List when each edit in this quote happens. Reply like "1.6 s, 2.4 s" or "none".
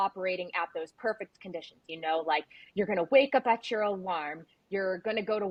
none